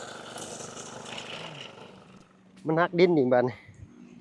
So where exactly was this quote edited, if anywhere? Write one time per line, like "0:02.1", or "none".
0:02.0